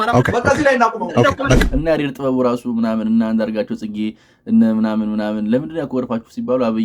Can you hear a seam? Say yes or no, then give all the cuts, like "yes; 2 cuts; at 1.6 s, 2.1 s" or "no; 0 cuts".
yes; 1 cut; at 1.7 s